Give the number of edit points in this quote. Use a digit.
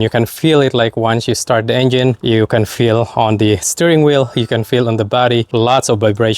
2